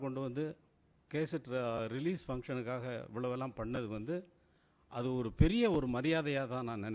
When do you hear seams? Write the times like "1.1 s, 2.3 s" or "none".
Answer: none